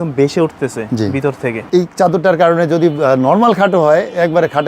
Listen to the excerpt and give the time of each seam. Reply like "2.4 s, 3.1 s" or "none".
1.6 s